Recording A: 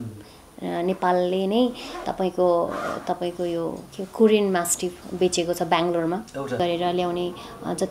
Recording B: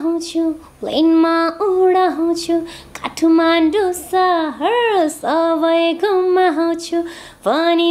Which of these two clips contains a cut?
A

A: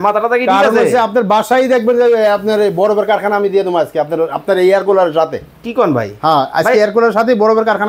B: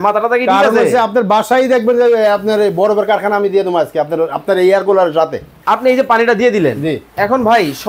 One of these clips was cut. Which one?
B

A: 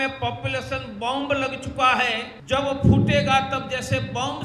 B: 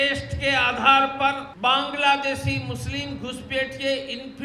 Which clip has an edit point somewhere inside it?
A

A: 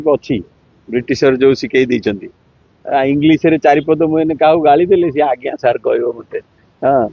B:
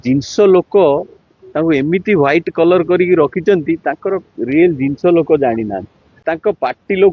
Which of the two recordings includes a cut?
B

